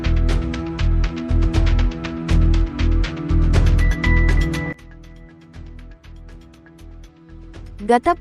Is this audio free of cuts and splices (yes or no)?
no